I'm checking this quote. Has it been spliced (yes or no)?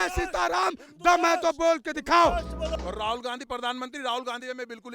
yes